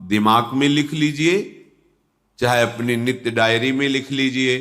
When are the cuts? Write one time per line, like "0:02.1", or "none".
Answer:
none